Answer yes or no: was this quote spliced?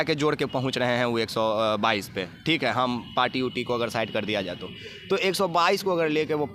no